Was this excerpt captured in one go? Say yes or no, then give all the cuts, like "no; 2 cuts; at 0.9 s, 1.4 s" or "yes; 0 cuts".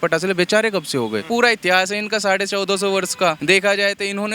no; 2 cuts; at 1.3 s, 3.4 s